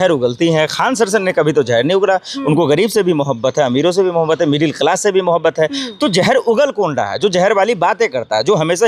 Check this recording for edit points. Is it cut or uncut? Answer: uncut